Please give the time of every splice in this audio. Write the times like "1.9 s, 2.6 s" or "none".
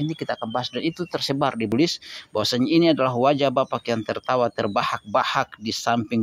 1.7 s